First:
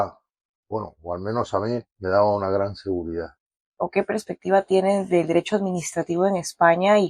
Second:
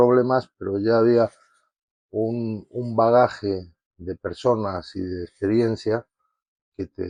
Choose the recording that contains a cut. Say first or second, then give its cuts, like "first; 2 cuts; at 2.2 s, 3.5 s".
first; 1 cut; at 3.7 s